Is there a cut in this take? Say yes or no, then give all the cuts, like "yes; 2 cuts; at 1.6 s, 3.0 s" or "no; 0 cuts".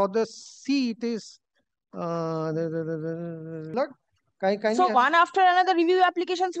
yes; 1 cut; at 3.7 s